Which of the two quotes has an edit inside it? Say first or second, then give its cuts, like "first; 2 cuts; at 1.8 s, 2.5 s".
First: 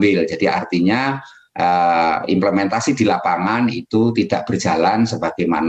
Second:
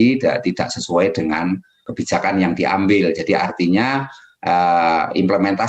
second; 1 cut; at 1.9 s